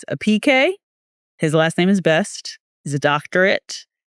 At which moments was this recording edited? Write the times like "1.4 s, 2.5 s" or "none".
none